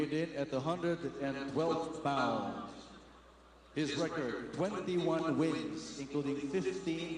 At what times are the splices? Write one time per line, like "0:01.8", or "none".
0:04.6